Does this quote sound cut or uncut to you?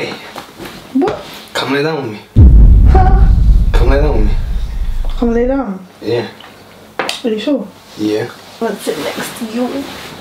cut